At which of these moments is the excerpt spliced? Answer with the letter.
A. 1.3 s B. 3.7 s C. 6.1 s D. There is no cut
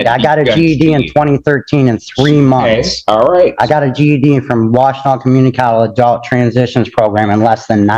A